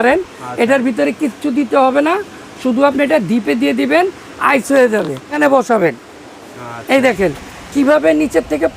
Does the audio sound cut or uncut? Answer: cut